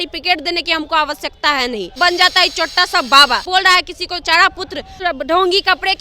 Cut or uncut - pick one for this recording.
cut